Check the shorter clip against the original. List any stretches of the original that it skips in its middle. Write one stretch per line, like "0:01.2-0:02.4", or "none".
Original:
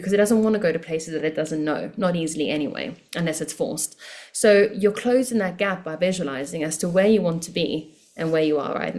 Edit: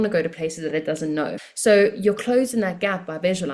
0:01.9-0:04.2